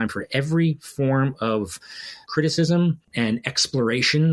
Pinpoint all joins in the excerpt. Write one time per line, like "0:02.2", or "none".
none